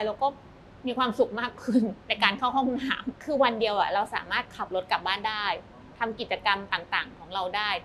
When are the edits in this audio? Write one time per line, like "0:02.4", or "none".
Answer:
0:03.2